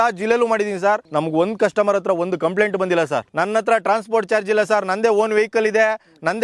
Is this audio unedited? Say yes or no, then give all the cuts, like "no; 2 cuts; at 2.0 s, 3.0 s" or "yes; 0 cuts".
no; 2 cuts; at 1.1 s, 3.3 s